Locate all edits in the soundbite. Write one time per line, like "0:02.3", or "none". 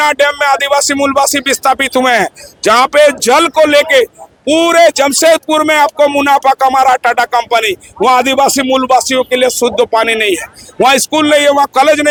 none

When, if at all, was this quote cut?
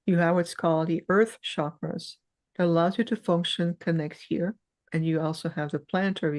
0:04.8

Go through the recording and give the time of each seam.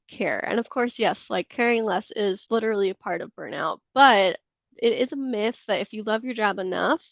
0:02.4

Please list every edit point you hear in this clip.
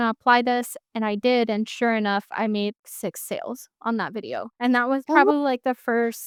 none

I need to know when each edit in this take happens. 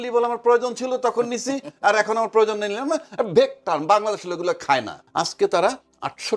0:05.0

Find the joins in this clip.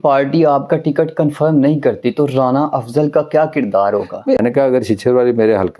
0:04.4

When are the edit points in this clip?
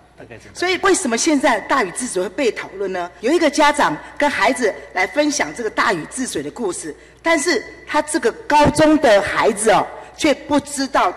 0:00.8
0:03.1

